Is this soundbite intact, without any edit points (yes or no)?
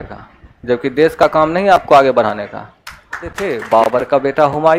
no